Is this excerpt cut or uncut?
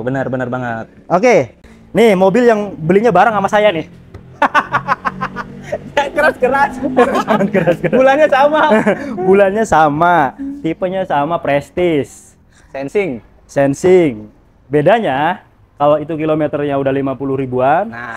cut